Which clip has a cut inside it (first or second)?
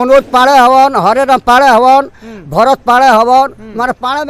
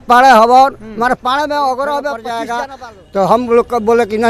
second